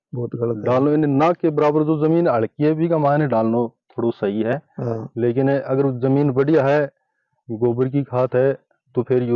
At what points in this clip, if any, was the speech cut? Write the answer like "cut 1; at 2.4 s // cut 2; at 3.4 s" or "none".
none